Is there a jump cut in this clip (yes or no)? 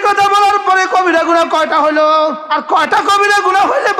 yes